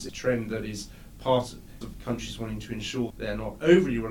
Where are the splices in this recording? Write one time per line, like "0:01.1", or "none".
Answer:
0:01.8